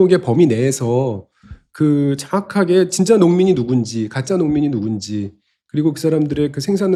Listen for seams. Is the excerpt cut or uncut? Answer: uncut